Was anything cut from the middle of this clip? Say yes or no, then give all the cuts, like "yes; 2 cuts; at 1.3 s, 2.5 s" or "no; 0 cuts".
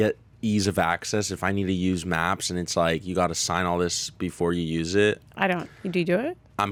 no; 0 cuts